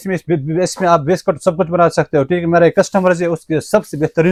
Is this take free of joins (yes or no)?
yes